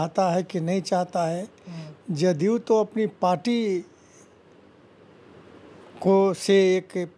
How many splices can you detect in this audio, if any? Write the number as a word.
zero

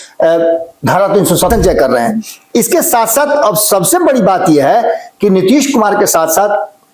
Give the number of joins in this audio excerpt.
one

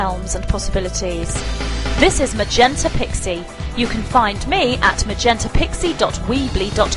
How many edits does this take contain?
zero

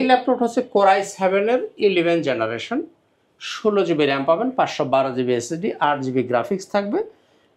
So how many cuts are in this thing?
zero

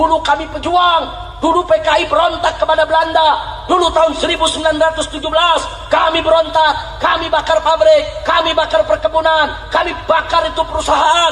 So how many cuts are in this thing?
zero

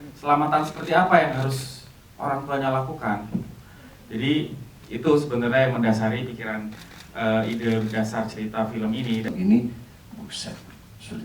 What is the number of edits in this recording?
one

